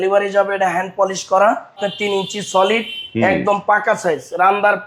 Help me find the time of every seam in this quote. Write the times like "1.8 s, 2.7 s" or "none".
1.8 s